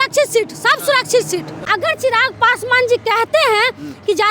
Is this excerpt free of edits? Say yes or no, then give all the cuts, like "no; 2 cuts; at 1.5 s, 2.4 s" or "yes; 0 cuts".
no; 1 cut; at 1.6 s